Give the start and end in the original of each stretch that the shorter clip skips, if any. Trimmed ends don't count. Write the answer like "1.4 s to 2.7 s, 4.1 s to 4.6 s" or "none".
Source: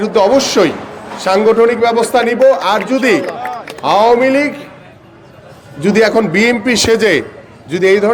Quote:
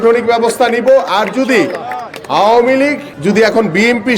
4.6 s to 5.7 s